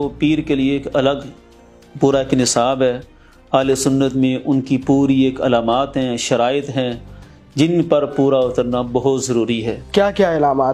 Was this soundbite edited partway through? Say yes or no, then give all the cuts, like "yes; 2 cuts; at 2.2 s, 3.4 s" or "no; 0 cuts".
no; 0 cuts